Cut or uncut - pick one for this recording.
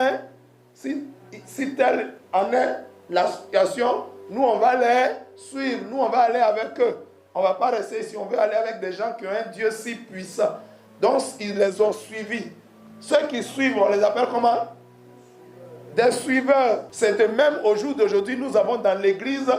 cut